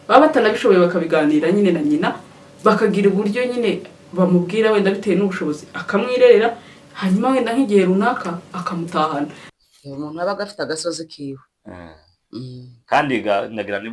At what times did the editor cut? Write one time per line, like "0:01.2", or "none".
0:09.5